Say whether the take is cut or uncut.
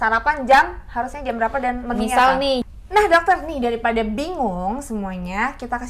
cut